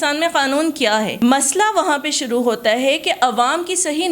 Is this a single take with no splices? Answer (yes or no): no